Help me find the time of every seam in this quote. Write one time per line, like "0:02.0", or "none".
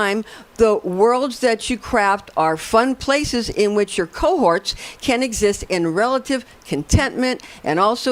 none